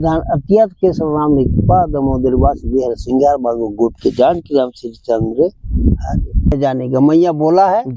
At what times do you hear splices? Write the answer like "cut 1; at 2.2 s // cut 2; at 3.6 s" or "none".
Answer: cut 1; at 6.5 s